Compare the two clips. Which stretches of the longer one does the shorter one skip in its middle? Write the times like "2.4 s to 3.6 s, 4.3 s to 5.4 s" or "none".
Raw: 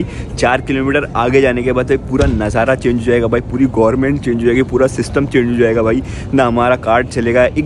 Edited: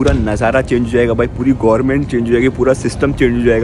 none